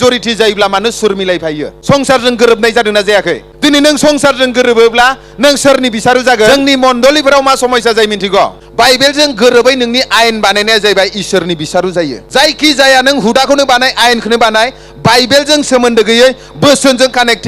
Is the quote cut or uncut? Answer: cut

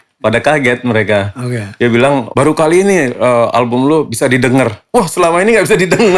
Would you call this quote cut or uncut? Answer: uncut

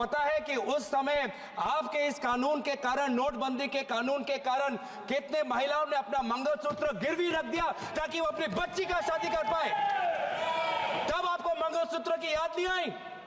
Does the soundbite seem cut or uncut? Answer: uncut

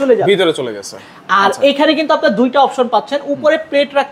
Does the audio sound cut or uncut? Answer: uncut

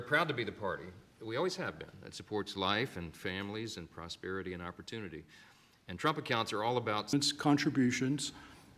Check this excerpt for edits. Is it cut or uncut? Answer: cut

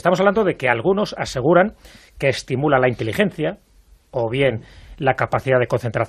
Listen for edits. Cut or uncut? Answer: cut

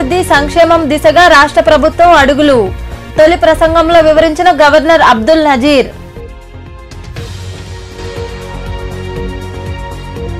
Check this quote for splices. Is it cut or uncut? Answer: uncut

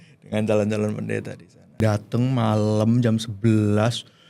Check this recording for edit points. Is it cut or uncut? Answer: cut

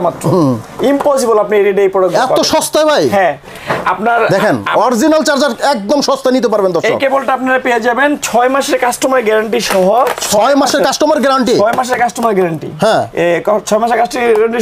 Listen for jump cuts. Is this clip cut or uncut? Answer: uncut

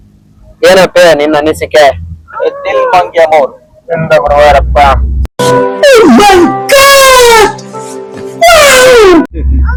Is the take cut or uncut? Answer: uncut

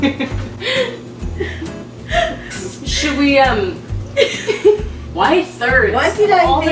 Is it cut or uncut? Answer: uncut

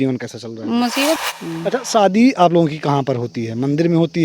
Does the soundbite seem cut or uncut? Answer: cut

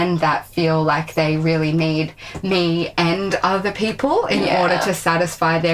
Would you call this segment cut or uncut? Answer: uncut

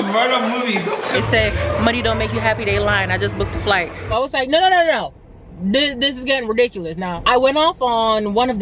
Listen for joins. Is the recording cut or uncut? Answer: cut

